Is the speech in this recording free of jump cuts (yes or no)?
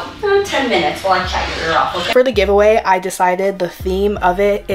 no